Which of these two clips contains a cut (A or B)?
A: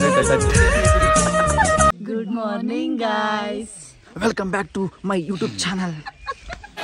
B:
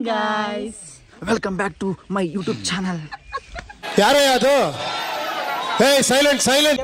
A